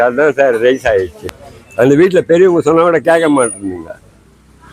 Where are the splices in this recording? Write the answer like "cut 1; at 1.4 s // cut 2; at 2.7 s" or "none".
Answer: cut 1; at 1.2 s